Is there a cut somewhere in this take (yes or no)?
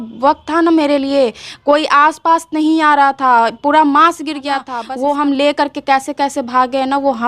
yes